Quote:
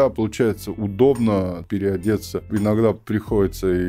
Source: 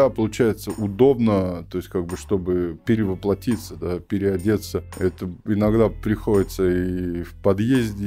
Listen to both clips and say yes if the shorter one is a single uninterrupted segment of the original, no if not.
no